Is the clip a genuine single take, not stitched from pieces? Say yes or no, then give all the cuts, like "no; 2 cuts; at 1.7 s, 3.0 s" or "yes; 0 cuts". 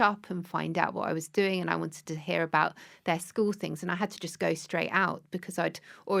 yes; 0 cuts